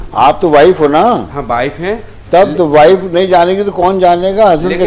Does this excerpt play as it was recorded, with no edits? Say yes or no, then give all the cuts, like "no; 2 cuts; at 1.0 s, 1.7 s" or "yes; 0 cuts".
yes; 0 cuts